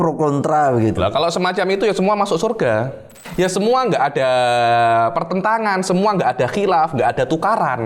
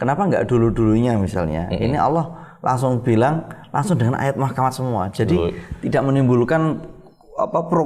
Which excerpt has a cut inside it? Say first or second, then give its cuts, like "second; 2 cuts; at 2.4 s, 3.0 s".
first; 1 cut; at 3.2 s